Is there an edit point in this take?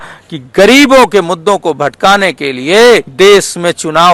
yes; 1 cut; at 3.1 s

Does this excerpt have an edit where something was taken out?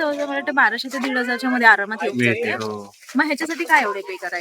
no; 0 cuts

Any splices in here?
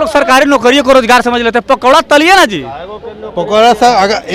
no; 0 cuts

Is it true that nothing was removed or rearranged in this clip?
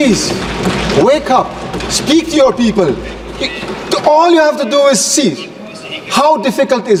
yes; 0 cuts

